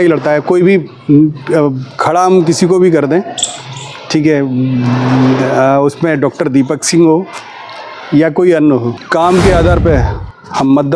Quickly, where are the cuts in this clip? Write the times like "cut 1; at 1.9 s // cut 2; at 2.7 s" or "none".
cut 1; at 9.0 s